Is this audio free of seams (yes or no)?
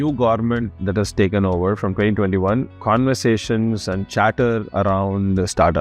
no